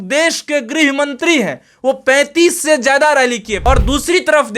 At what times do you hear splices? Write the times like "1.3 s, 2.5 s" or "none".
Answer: 3.6 s